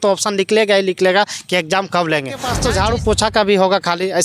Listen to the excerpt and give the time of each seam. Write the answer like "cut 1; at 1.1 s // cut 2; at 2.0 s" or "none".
cut 1; at 2.5 s